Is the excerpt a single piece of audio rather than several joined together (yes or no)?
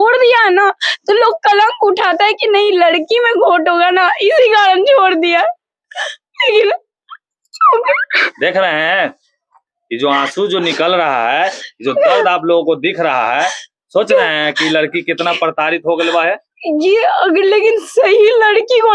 yes